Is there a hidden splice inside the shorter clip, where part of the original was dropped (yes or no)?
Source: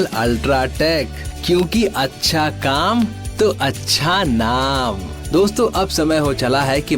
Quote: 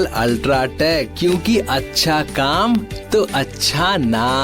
yes